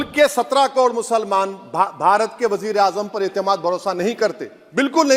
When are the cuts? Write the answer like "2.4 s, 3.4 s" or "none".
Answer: none